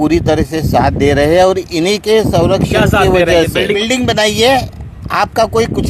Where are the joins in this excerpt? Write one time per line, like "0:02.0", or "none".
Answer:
0:03.8